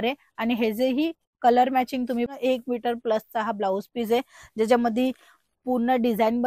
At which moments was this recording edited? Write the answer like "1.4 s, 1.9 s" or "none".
2.3 s